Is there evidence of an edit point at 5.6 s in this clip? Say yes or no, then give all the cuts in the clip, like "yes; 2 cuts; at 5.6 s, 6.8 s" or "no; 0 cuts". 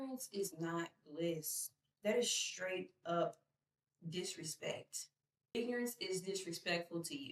yes; 1 cut; at 5.6 s